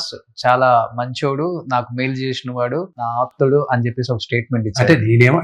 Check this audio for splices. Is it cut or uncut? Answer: cut